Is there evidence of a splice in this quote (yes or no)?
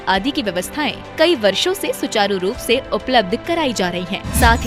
no